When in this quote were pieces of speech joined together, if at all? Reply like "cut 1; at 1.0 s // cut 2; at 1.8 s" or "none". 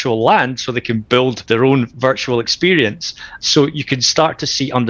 cut 1; at 1.4 s // cut 2; at 3.3 s